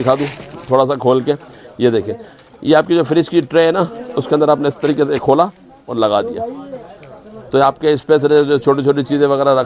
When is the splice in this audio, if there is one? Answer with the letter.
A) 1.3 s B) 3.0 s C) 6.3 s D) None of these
D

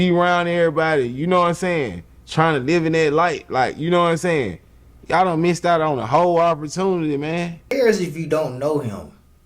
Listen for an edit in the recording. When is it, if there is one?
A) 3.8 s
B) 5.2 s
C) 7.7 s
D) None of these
C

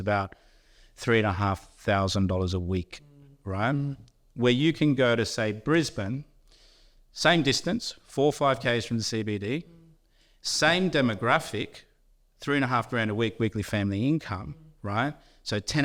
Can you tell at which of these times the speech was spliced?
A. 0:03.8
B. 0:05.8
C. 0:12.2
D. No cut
D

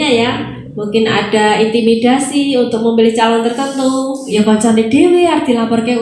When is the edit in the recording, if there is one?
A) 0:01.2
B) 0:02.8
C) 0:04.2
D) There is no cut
C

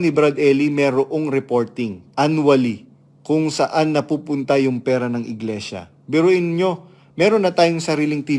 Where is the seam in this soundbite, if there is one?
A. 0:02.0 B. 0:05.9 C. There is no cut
A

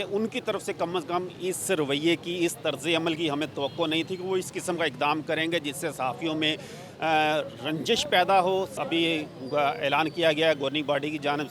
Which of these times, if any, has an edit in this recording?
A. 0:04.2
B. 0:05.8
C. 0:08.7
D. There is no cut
C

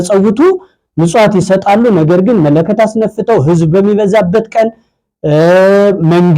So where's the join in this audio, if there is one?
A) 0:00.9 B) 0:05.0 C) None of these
C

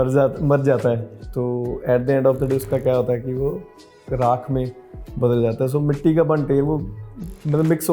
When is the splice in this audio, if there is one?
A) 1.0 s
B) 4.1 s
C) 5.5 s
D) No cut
B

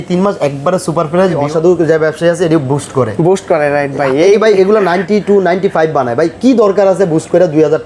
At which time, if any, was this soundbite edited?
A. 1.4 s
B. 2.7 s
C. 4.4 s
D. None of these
A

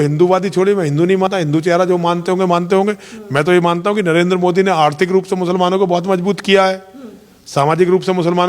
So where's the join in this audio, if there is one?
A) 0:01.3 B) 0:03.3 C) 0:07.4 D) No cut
A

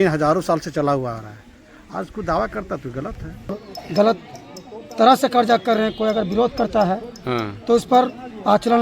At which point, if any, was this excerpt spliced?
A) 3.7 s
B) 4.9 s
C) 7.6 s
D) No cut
A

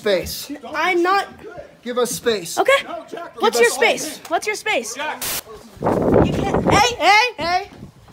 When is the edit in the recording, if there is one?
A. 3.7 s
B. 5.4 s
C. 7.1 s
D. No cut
B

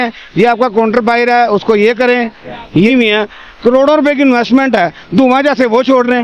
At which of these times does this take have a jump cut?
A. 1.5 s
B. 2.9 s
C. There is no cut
B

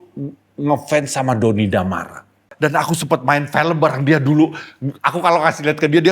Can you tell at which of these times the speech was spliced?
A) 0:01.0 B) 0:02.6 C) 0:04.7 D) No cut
B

